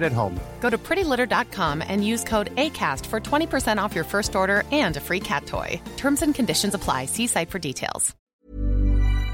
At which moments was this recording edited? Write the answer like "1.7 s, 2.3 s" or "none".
8.1 s